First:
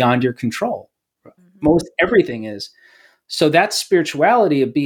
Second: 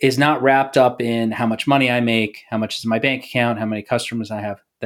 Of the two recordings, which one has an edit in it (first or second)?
first